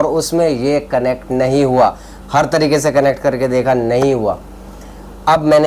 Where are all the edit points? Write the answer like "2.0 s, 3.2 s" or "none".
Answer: none